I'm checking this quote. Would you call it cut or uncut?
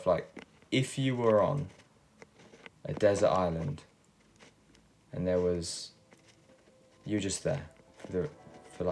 uncut